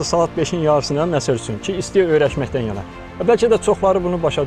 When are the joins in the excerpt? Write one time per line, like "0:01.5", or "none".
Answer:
none